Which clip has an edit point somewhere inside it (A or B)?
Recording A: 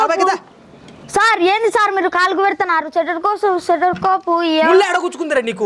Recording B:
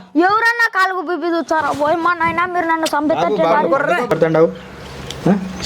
B